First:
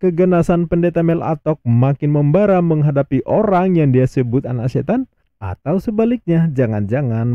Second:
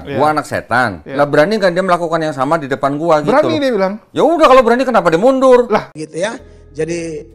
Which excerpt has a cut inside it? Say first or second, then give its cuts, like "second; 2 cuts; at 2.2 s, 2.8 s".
second; 1 cut; at 5.9 s